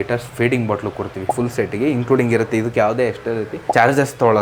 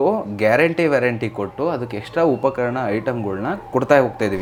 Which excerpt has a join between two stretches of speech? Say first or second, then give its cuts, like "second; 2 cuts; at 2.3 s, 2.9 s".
first; 2 cuts; at 1.3 s, 3.6 s